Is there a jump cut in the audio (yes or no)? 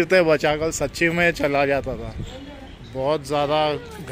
yes